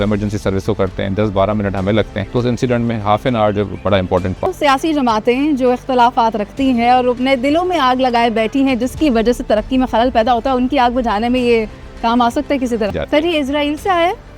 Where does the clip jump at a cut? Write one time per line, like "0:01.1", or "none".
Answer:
0:02.2
0:04.5
0:13.0